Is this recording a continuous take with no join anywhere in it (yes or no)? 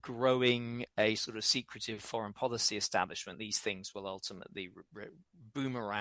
yes